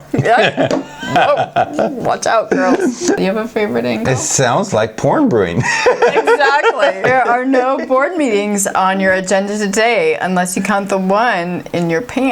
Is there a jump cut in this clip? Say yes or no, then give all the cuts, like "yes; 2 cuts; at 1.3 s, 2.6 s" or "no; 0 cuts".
yes; 2 cuts; at 3.2 s, 7.1 s